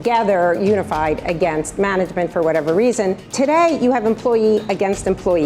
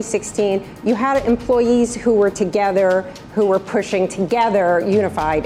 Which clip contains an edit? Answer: first; 1 cut; at 3.2 s

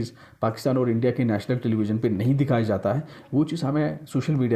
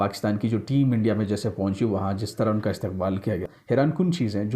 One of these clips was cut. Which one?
second; 1 cut; at 3.5 s

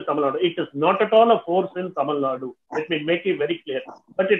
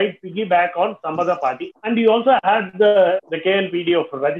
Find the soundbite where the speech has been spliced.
second; 2 cuts; at 1.7 s, 3.2 s

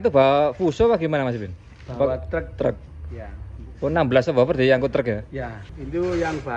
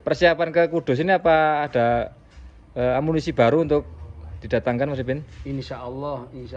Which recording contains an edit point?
first; 1 cut; at 5.6 s

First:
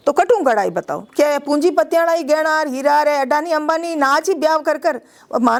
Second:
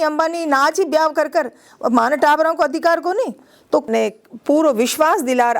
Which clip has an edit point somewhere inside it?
second; 1 cut; at 3.9 s

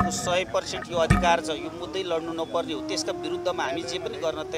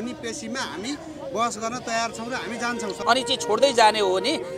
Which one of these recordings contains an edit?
second; 1 cut; at 3.0 s

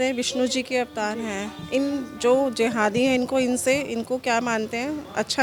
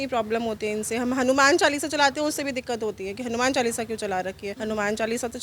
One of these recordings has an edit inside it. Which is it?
second; 1 cut; at 4.5 s

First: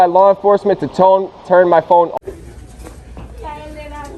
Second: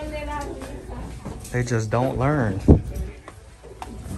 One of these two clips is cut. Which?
first; 1 cut; at 2.1 s

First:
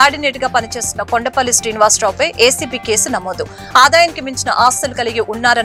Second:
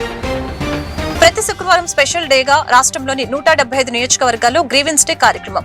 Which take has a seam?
second; 1 cut; at 1.1 s

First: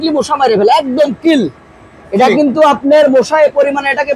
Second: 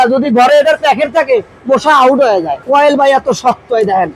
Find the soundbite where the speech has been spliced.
second; 1 cut; at 2.6 s

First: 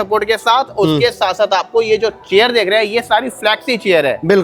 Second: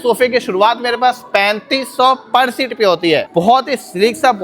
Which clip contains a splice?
second; 1 cut; at 3.3 s

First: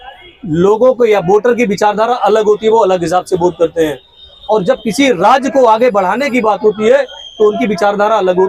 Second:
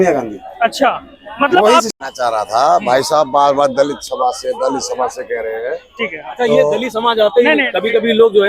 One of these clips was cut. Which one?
second; 1 cut; at 1.9 s

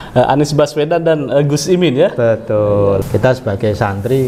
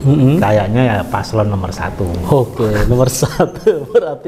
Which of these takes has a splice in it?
first; 1 cut; at 3.0 s

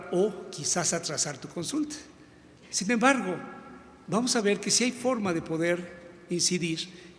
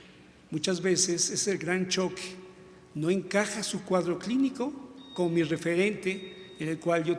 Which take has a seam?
second; 1 cut; at 4.0 s

